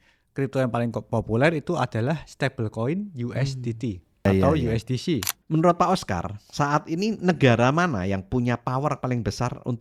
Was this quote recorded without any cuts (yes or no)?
no